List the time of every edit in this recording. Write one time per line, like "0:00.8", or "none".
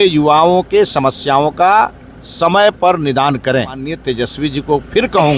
0:04.0